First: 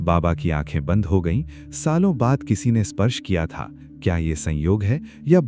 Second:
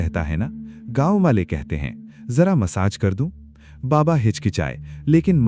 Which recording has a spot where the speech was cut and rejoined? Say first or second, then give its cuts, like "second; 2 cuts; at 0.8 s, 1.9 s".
first; 1 cut; at 3.9 s